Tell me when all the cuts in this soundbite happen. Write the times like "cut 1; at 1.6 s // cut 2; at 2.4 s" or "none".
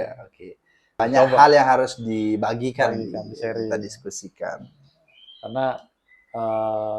cut 1; at 1.0 s